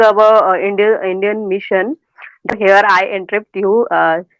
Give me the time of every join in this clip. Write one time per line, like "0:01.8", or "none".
0:02.5